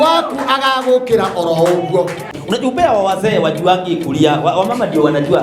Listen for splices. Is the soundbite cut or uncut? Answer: cut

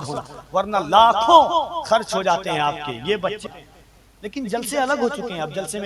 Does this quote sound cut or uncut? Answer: cut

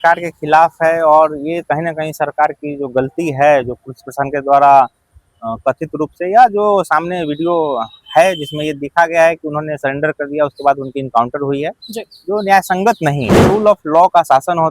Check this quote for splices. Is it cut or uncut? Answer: cut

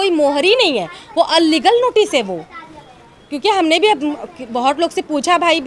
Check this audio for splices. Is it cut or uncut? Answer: uncut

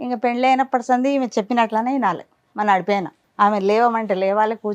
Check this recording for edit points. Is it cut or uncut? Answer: cut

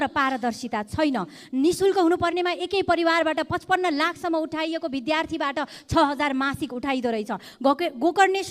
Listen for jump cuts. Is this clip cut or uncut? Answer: uncut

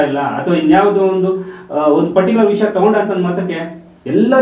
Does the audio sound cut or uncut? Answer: uncut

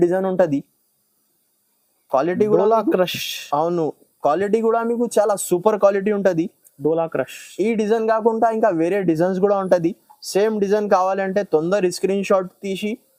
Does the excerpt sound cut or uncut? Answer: uncut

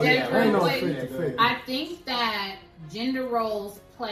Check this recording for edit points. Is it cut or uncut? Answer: uncut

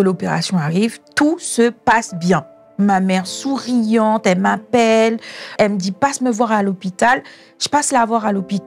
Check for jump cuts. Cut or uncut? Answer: cut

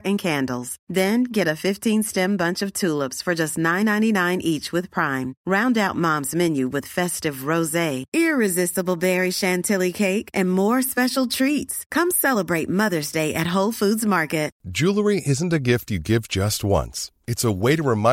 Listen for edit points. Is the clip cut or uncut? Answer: cut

